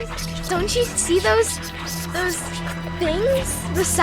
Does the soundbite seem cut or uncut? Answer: uncut